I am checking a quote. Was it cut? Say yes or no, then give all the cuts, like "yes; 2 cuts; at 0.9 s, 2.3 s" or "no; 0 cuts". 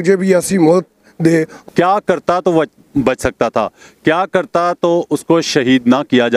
yes; 1 cut; at 1.6 s